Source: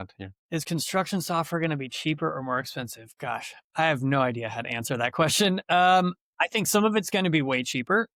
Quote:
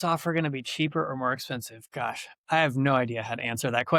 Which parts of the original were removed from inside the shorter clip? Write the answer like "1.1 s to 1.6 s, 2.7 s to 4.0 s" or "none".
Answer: none